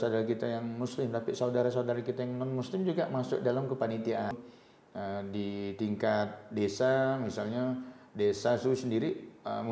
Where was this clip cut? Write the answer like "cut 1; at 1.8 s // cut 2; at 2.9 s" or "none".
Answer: cut 1; at 4.3 s

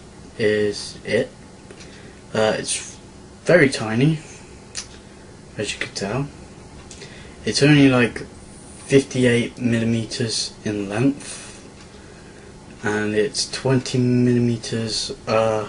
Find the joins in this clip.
none

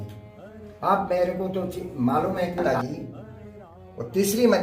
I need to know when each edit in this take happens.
cut 1; at 2.6 s

